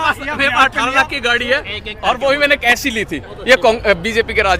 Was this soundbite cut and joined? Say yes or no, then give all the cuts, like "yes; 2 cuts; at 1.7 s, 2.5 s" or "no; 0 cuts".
yes; 1 cut; at 3.3 s